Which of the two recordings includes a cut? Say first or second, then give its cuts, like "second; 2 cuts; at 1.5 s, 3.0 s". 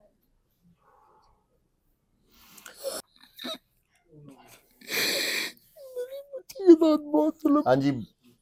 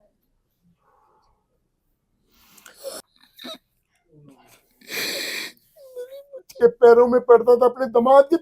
second; 1 cut; at 6.5 s